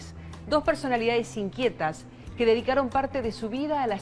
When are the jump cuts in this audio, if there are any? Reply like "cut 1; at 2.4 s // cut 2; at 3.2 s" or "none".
cut 1; at 1.4 s